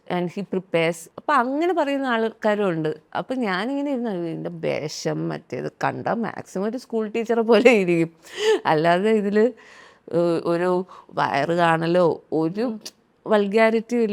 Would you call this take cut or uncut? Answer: cut